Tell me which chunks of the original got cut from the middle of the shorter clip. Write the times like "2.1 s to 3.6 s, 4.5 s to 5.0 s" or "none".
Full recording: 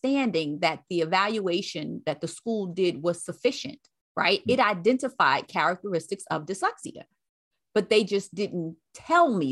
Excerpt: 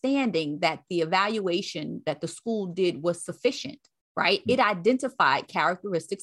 none